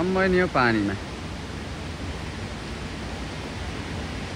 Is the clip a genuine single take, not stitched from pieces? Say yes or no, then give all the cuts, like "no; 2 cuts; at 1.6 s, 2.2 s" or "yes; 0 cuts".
yes; 0 cuts